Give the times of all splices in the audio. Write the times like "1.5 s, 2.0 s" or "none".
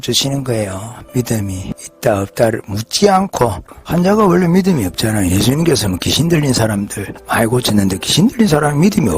1.0 s, 1.7 s, 3.6 s